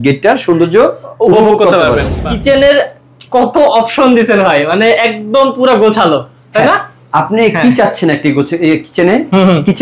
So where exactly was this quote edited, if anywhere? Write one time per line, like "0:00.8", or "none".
0:02.1